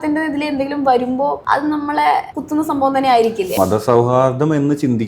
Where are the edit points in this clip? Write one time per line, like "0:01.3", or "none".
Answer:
0:01.4
0:02.4
0:03.5